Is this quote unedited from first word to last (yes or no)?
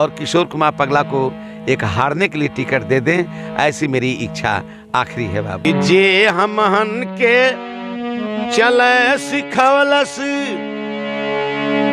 no